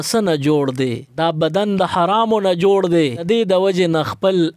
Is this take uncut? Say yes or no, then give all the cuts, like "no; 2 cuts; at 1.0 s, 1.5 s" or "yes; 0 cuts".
no; 2 cuts; at 1.1 s, 3.2 s